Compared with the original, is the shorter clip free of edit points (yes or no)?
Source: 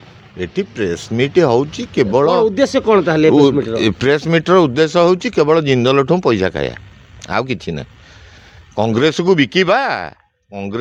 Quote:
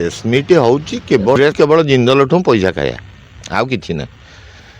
no